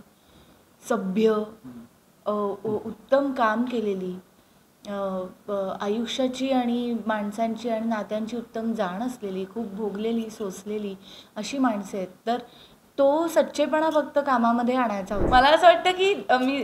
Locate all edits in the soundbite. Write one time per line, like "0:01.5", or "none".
0:15.2